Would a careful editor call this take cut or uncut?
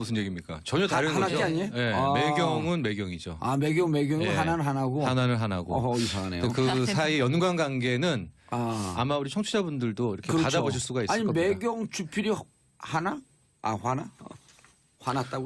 uncut